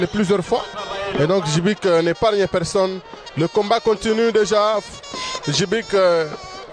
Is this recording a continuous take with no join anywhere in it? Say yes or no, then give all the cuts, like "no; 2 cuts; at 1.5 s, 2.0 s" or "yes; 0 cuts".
yes; 0 cuts